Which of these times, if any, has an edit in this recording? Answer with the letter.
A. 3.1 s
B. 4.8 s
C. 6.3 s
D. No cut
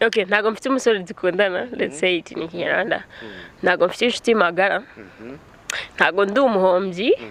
D